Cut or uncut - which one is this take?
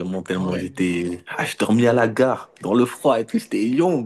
uncut